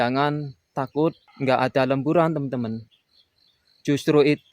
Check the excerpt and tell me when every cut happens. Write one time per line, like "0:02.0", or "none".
0:01.3